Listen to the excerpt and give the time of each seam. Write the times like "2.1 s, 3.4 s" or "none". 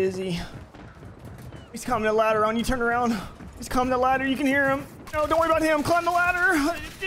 none